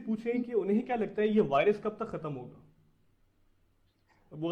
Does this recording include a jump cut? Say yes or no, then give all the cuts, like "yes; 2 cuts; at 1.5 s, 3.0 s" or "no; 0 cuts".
no; 0 cuts